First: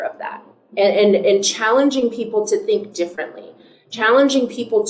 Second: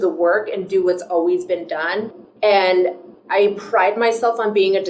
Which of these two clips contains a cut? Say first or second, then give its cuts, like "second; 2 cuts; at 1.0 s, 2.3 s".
second; 2 cuts; at 2.2 s, 3.1 s